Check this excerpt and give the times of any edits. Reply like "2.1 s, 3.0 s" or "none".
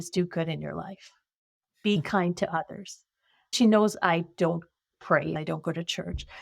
3.5 s, 5.3 s